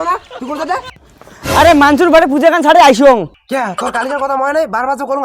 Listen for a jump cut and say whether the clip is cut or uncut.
uncut